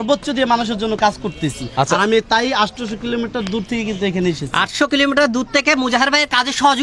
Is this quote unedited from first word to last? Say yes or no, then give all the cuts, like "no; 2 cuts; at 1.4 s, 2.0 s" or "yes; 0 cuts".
yes; 0 cuts